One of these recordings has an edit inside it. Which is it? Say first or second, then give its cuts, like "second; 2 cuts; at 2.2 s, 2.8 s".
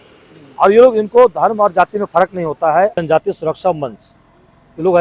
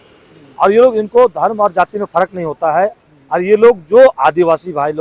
first; 1 cut; at 3.0 s